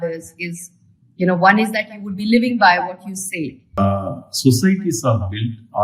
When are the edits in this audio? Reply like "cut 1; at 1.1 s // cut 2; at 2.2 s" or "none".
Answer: cut 1; at 3.8 s